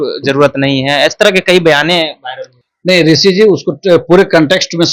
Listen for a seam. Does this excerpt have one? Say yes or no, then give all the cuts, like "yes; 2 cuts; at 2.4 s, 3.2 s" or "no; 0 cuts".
no; 0 cuts